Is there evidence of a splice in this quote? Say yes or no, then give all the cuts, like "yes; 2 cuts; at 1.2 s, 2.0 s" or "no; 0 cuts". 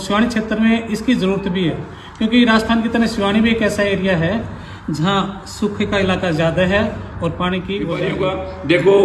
yes; 1 cut; at 8.1 s